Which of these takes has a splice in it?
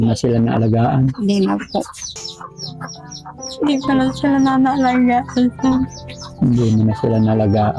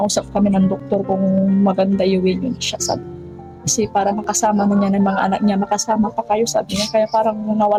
first; 1 cut; at 2.3 s

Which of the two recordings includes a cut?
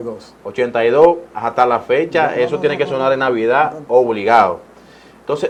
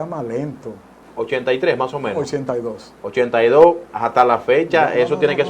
second; 1 cut; at 1.1 s

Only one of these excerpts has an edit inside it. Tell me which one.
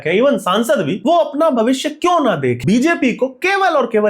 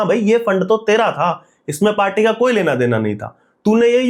first; 2 cuts; at 0.9 s, 2.6 s

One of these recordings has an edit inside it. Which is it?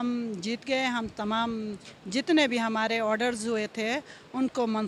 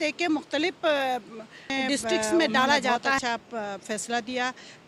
second; 1 cut; at 3.2 s

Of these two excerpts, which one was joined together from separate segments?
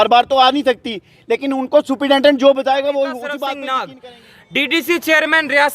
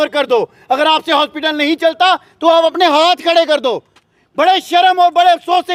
first; 1 cut; at 3.9 s

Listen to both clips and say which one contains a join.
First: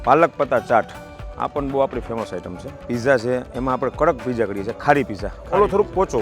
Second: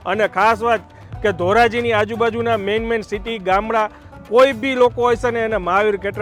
first; 1 cut; at 2.8 s

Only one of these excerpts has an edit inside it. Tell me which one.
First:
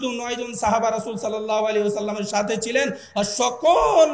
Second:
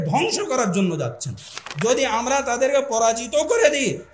second; 1 cut; at 1.6 s

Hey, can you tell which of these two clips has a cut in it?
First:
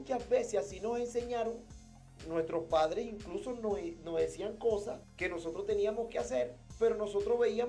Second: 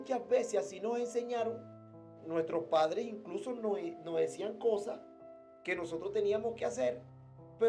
first; 2 cuts; at 5.0 s, 6.6 s

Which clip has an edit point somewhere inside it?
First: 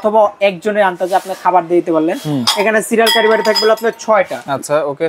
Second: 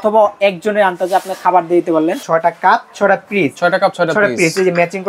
second; 1 cut; at 2.2 s

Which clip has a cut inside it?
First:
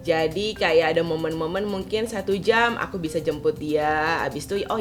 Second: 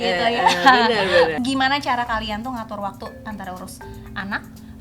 second; 1 cut; at 1.3 s

